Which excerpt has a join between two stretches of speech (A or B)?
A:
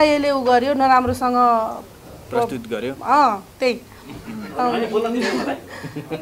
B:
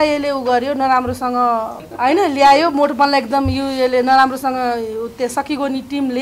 B